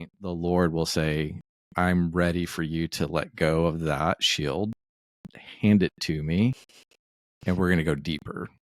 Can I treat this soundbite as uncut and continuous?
yes; 0 cuts

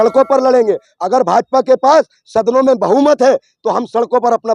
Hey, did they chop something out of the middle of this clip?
no; 0 cuts

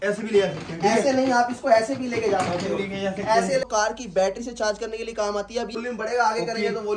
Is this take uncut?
no; 2 cuts; at 3.6 s, 5.8 s

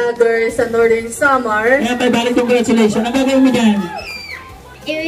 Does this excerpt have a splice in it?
yes; 1 cut; at 1.9 s

